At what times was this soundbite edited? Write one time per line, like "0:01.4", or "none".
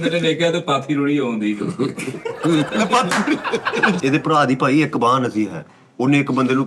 0:04.0